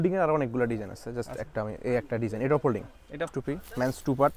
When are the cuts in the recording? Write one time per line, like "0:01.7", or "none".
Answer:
0:03.3